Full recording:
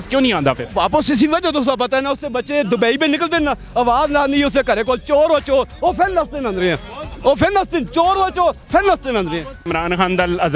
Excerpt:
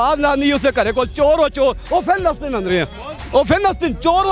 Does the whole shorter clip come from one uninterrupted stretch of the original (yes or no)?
yes